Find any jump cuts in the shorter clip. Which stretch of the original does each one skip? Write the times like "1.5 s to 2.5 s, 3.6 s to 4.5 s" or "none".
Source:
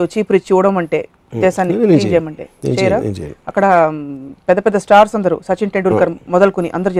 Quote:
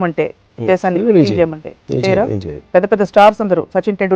3.3 s to 4.3 s